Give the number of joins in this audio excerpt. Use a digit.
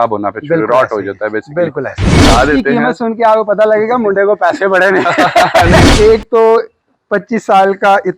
2